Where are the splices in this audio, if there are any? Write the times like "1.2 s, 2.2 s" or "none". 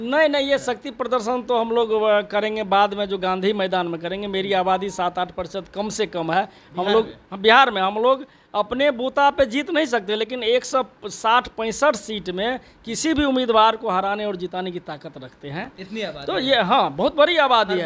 none

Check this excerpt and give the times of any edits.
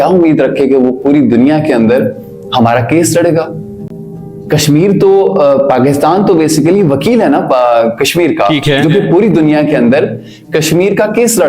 none

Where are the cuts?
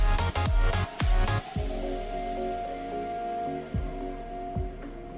1.5 s

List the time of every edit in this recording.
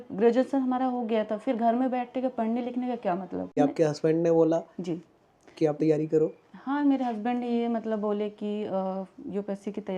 3.5 s

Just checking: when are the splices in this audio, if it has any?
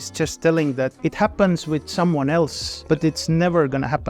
1.0 s, 2.7 s

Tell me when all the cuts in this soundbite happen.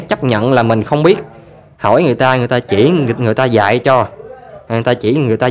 none

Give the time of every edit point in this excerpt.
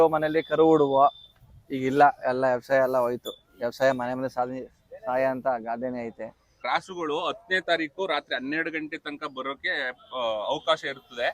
6.6 s

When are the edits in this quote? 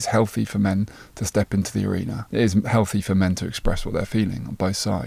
2.2 s

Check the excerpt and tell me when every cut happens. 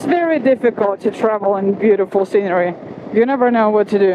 1.0 s

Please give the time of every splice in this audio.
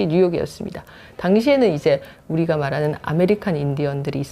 none

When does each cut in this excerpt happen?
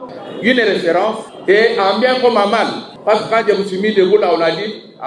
1.3 s, 2.9 s

